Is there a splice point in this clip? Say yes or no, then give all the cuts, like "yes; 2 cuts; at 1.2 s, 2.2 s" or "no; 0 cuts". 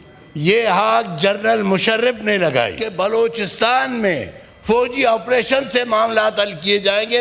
yes; 1 cut; at 2.8 s